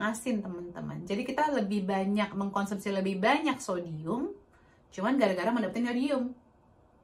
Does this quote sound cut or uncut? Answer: uncut